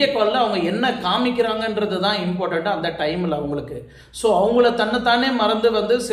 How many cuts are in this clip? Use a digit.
0